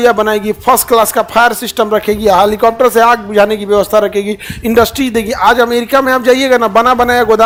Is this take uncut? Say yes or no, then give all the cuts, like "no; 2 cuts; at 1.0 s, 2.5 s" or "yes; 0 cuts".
yes; 0 cuts